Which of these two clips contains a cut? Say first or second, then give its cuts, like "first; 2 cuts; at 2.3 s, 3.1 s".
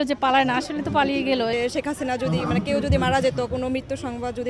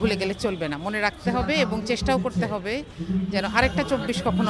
first; 1 cut; at 1.5 s